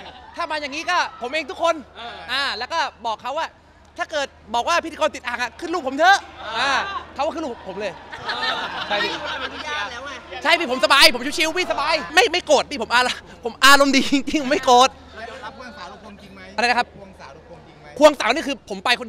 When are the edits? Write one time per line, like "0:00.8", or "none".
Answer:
0:12.1